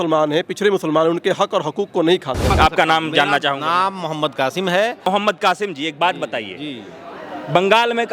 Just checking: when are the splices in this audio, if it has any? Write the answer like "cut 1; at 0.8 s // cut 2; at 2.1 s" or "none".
cut 1; at 2.5 s // cut 2; at 5.1 s